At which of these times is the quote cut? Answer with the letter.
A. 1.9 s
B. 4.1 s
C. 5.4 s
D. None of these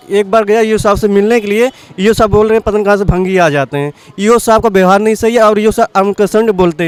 D